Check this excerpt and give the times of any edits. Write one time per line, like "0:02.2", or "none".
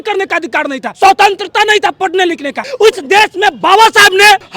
0:00.9
0:02.6